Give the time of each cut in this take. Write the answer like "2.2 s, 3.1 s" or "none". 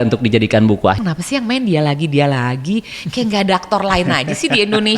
1.0 s

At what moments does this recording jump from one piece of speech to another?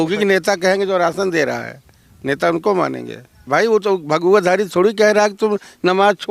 3.5 s

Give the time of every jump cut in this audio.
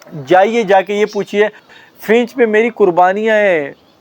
1.7 s

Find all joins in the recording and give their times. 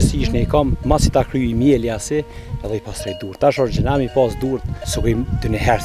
4.8 s

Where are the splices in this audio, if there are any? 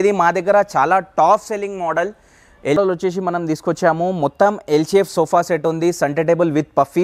2.8 s

